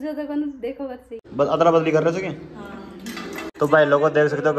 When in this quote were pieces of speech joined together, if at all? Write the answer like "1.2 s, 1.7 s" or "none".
1.1 s, 3.5 s